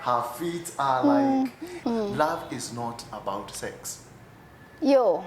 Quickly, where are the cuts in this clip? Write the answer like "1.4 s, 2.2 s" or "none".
1.7 s